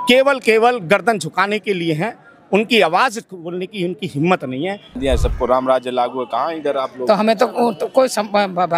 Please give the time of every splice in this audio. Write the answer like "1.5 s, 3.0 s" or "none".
5.0 s